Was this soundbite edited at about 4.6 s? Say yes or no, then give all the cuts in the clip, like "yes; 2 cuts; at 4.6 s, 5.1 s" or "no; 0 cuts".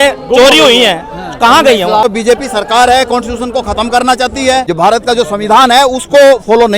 yes; 2 cuts; at 2.0 s, 4.6 s